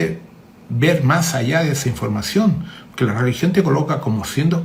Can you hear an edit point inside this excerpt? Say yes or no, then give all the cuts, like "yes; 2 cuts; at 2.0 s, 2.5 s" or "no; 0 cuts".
no; 0 cuts